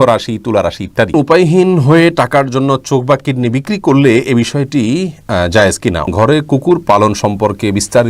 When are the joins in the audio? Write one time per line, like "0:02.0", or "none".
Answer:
0:01.1
0:06.1